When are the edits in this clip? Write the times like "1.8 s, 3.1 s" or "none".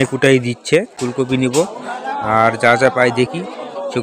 0.9 s